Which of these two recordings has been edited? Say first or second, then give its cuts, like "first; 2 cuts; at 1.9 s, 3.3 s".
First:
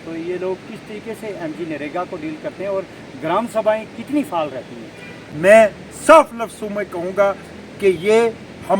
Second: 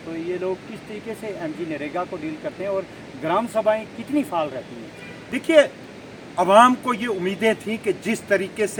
first; 1 cut; at 5.2 s